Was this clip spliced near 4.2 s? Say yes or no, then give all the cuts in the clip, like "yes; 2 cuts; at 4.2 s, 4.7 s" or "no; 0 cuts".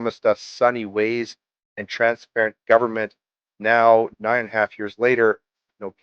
yes; 1 cut; at 4.2 s